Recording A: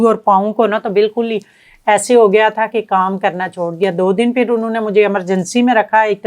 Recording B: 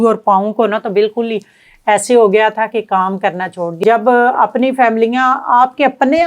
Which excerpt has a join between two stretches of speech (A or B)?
B